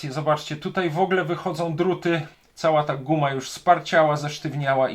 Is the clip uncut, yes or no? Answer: no